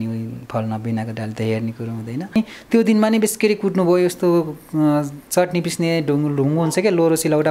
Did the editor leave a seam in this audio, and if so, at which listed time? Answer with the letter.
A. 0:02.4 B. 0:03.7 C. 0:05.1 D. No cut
A